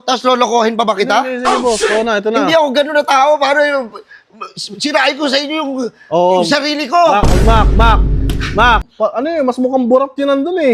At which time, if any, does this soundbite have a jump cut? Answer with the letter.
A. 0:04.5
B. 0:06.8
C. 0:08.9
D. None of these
C